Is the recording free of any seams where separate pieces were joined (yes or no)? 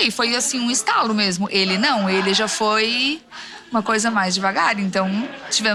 yes